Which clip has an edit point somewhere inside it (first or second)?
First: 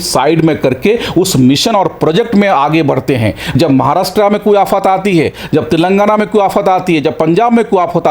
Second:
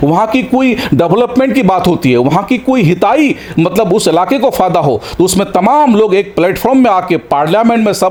first